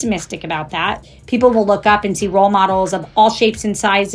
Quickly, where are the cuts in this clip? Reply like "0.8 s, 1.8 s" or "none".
1.0 s

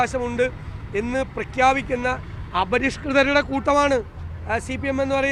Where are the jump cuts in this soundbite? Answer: none

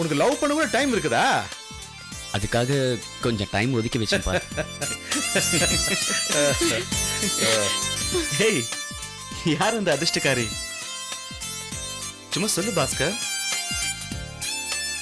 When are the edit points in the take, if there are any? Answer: none

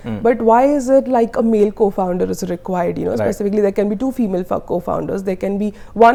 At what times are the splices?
none

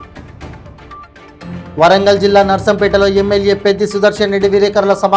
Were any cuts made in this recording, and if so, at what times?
1.5 s

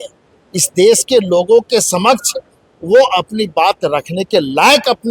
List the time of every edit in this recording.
none

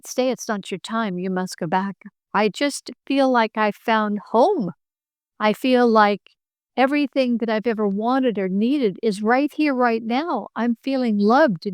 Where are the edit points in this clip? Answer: 2.3 s

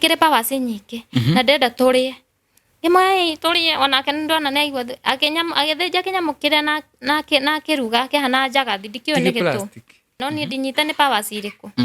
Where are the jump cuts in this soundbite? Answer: 10.1 s

